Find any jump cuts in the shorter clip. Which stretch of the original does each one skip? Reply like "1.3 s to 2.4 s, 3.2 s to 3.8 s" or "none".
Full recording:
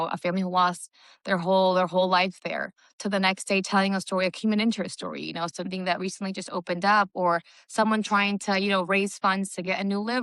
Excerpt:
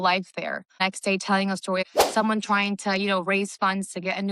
2.9 s to 3.2 s, 4.3 s to 7.5 s